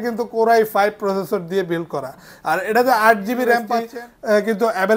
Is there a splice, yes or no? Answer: yes